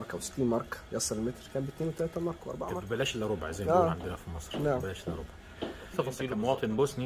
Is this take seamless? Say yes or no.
no